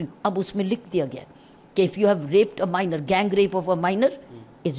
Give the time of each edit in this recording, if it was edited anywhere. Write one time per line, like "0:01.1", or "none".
none